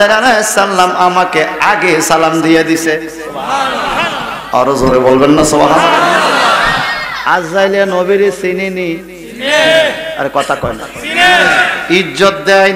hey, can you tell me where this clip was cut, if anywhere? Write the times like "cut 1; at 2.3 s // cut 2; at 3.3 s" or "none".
none